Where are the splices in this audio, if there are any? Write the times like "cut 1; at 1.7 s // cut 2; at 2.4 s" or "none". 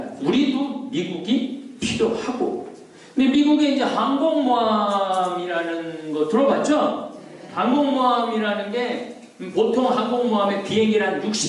none